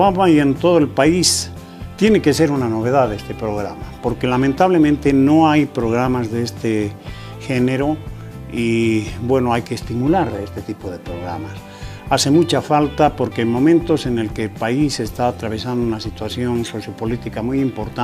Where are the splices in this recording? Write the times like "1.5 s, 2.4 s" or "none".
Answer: 13.5 s